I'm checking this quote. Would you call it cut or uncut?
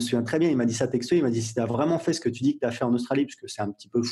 cut